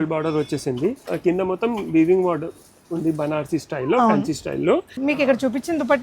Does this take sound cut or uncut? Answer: cut